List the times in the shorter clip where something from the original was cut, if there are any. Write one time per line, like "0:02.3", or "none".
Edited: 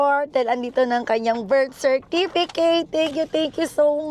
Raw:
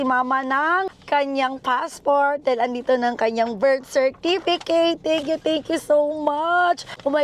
none